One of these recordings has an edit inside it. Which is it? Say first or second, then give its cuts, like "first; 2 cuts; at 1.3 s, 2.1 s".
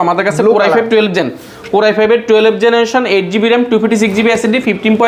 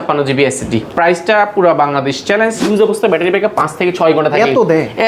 second; 1 cut; at 2.6 s